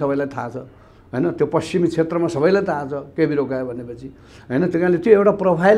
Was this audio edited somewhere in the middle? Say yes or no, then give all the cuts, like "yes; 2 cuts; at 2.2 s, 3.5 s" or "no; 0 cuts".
no; 0 cuts